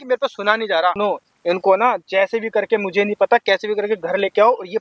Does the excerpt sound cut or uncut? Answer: cut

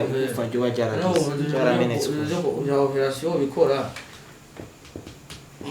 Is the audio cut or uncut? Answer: uncut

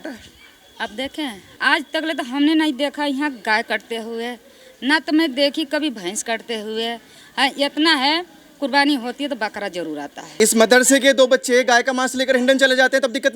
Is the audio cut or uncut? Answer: cut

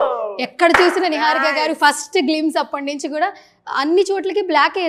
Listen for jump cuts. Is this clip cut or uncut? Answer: uncut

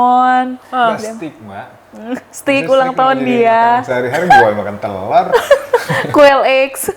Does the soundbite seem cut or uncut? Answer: uncut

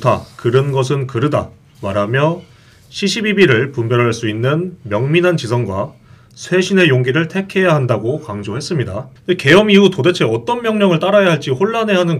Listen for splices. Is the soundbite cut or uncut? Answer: cut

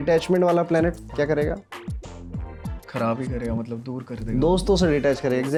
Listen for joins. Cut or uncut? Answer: uncut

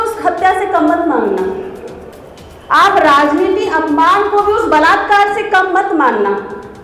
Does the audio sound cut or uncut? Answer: uncut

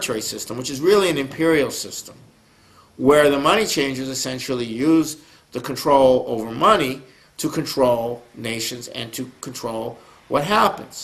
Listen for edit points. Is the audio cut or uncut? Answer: cut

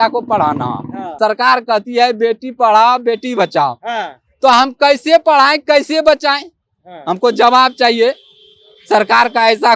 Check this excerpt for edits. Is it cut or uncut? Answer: cut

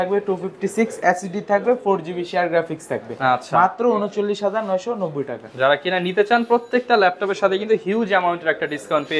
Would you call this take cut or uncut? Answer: uncut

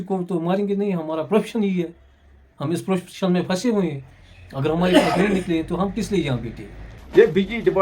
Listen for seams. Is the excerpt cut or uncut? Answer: cut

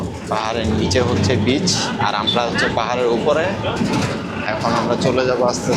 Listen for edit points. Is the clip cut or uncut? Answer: uncut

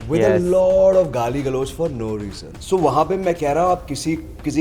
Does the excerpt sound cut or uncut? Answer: cut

